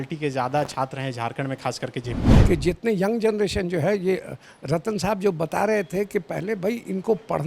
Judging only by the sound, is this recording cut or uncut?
cut